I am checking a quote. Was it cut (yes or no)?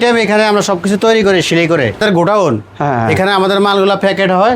yes